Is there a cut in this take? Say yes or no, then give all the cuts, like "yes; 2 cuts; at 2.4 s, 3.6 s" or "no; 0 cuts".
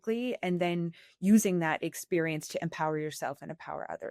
no; 0 cuts